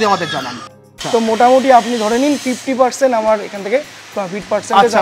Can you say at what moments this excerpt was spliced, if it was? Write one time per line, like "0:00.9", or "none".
0:01.0